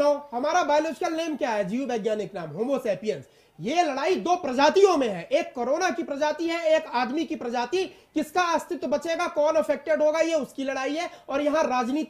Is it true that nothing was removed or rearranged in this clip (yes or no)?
yes